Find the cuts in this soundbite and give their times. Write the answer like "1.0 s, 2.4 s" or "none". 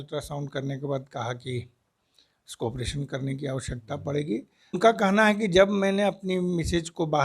4.8 s